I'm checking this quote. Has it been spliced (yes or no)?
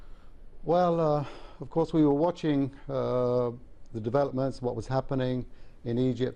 no